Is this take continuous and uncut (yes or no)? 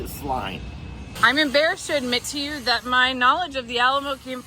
no